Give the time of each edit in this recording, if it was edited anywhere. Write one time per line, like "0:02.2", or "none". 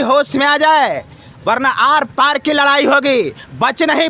none